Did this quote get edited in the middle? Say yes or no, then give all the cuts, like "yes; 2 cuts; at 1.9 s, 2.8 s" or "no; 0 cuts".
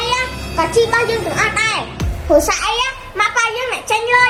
no; 0 cuts